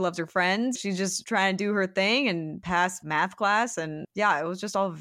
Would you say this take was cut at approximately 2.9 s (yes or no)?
yes